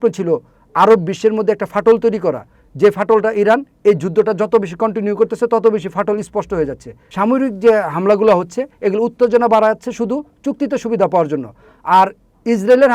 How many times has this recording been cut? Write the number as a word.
one